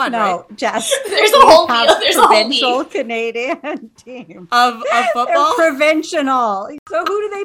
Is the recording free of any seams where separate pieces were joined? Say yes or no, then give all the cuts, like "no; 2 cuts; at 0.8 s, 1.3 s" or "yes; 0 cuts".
yes; 0 cuts